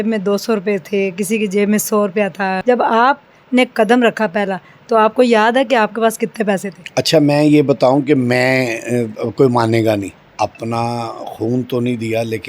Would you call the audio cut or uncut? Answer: cut